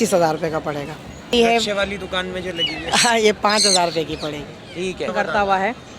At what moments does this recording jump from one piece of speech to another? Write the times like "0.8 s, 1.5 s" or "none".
1.3 s, 5.1 s